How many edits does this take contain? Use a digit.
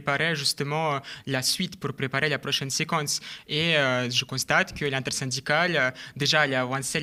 0